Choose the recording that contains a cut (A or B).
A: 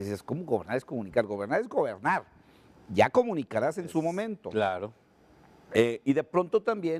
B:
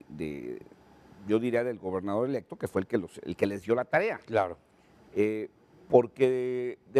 B